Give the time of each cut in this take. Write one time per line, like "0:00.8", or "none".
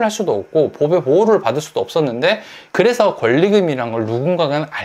0:02.6